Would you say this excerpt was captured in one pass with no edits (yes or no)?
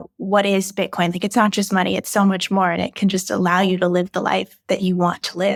yes